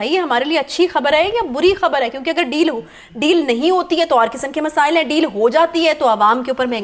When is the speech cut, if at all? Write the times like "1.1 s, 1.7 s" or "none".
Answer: none